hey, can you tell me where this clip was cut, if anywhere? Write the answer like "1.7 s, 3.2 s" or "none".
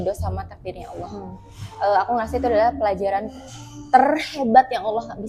none